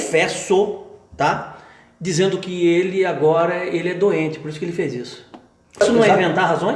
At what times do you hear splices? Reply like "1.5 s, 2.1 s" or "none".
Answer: 5.8 s